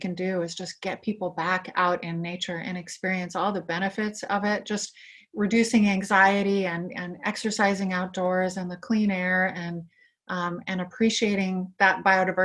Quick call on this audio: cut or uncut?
uncut